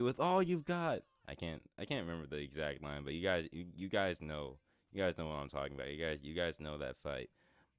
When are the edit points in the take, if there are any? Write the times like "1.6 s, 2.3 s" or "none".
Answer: none